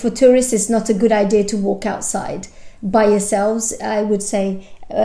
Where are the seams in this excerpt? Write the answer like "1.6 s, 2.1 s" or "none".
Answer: none